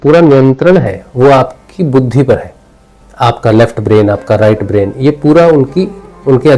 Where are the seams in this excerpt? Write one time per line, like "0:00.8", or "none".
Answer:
none